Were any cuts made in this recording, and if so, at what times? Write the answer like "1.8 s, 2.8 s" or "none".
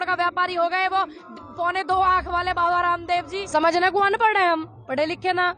3.4 s